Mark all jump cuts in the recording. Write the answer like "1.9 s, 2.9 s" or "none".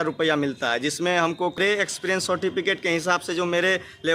1.6 s